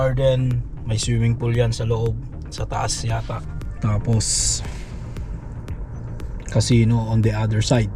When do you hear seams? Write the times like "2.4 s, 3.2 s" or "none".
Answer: 3.6 s